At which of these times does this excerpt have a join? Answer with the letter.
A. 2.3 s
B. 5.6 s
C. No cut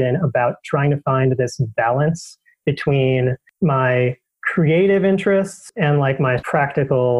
C